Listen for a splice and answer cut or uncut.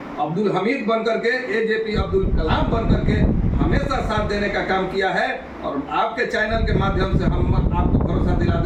uncut